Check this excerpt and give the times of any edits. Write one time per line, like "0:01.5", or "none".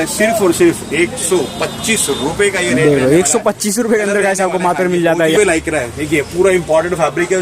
0:05.4